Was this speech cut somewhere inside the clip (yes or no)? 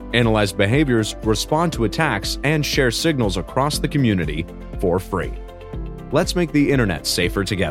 no